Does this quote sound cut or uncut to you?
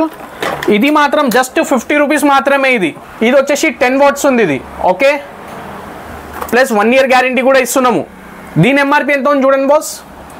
cut